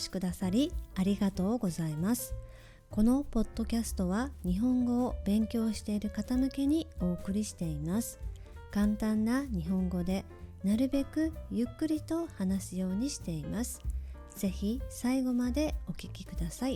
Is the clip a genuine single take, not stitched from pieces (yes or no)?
yes